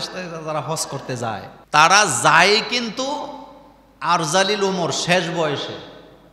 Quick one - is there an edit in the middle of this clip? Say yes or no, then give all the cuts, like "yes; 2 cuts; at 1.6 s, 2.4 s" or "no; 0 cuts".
yes; 1 cut; at 1.5 s